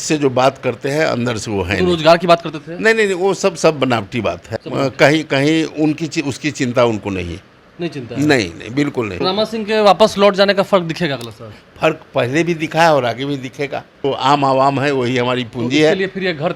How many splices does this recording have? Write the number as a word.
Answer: three